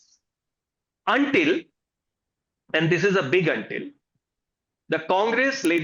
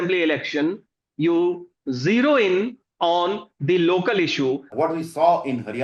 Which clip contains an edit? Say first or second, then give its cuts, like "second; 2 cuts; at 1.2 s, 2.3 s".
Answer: second; 1 cut; at 4.7 s